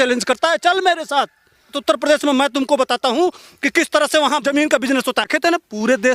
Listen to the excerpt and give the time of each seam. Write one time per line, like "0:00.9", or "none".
0:01.8
0:04.5
0:05.3